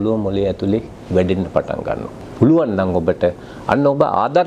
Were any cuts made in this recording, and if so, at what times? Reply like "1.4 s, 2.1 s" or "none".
2.2 s